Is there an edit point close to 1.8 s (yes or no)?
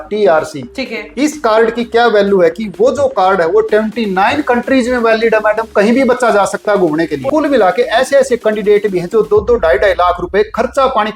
no